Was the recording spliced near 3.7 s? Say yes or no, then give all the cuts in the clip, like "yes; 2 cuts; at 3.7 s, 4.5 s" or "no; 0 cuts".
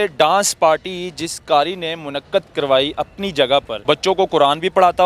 yes; 1 cut; at 3.7 s